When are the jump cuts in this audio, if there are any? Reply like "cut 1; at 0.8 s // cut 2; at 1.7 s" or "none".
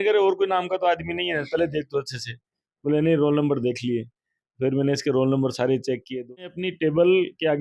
cut 1; at 6.4 s

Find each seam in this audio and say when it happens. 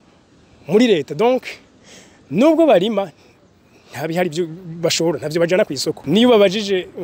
cut 1; at 6.0 s

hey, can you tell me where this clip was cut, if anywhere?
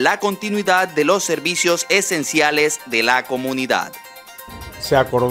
cut 1; at 4.4 s

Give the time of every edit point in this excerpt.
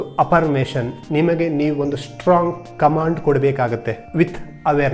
cut 1; at 4.0 s

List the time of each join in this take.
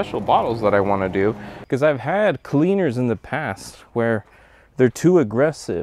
cut 1; at 1.5 s

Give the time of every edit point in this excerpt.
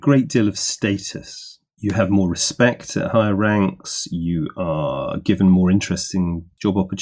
none

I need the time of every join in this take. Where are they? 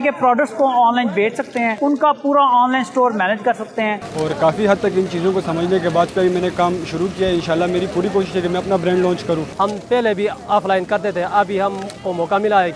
cut 1; at 1.7 s // cut 2; at 4.0 s // cut 3; at 6.1 s // cut 4; at 9.4 s

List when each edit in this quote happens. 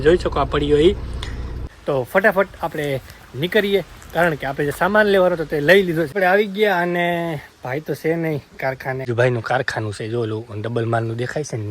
cut 1; at 1.6 s // cut 2; at 6.1 s // cut 3; at 9.1 s

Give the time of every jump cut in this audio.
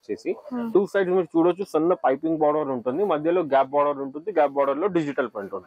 none

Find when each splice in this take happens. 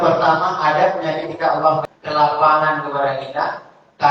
cut 1; at 1.8 s

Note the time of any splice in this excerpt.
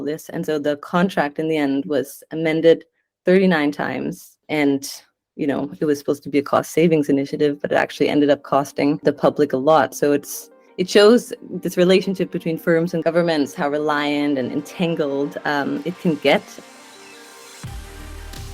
cut 1; at 16.6 s

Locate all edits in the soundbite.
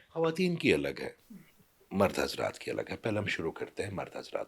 none

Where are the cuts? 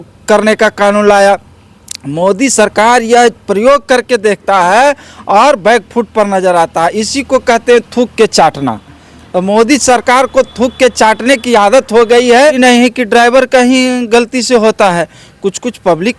cut 1; at 12.6 s

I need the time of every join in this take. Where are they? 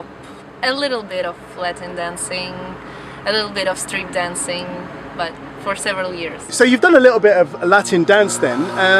cut 1; at 4.7 s

